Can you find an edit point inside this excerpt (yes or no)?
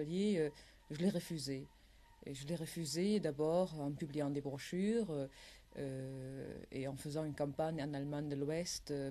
no